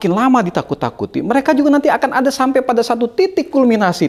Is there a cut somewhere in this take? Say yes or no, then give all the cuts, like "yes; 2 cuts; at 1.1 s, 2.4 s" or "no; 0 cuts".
no; 0 cuts